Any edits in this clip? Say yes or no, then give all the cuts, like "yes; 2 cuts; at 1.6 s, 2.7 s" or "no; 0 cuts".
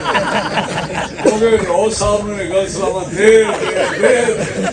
no; 0 cuts